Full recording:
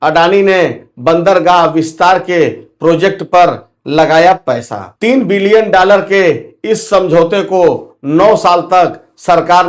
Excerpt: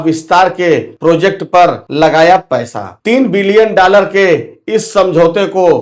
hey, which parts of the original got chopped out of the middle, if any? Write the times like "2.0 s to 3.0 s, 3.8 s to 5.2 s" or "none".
2.6 s to 2.7 s, 3.6 s to 3.8 s

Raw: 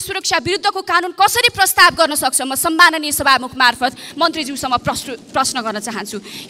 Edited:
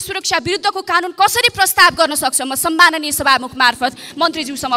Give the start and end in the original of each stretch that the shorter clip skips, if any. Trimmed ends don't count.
none

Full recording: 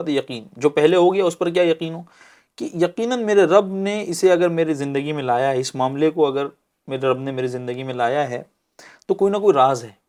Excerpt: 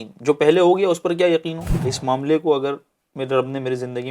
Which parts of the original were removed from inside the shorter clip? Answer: 2.3 s to 5.6 s

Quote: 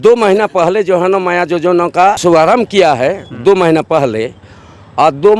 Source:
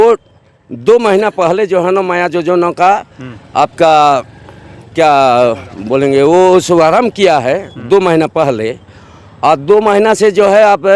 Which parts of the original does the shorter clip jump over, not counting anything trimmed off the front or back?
3.0 s to 6.7 s

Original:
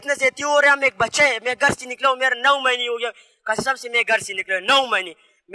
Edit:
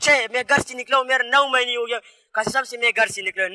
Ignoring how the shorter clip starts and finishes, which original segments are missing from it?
none

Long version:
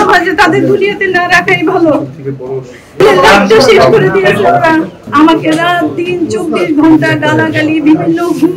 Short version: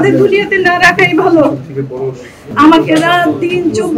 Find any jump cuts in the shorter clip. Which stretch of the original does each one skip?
2.9 s to 4.9 s

